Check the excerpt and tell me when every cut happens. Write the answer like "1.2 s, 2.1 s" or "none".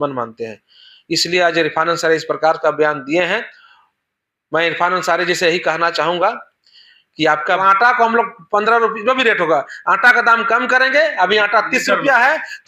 7.6 s